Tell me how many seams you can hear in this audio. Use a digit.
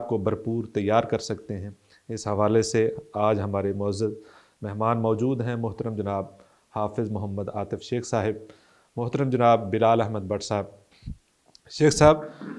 0